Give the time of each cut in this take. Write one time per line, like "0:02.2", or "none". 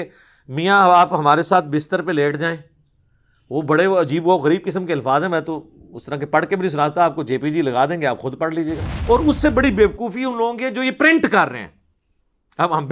0:08.9